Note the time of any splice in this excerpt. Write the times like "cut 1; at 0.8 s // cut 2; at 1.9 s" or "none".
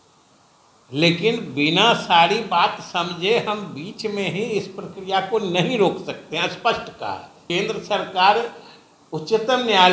cut 1; at 7.3 s